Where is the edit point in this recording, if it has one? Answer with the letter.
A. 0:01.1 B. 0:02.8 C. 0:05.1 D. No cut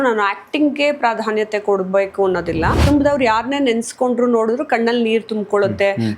B